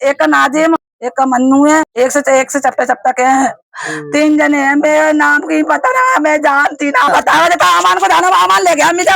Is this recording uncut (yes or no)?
no